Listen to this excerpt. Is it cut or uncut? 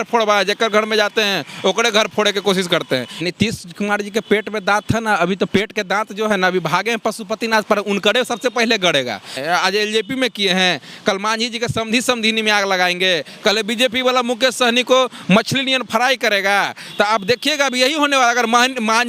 cut